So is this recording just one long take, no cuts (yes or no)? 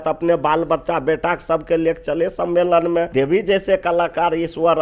no